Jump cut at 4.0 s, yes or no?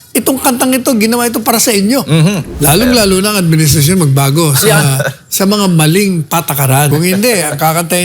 no